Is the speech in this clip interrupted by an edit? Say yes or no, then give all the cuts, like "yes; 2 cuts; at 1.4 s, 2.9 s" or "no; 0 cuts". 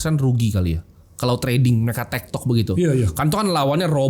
no; 0 cuts